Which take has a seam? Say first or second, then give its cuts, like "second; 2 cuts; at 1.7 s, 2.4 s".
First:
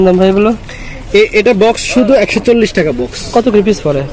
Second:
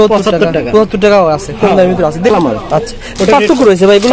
second; 1 cut; at 2.3 s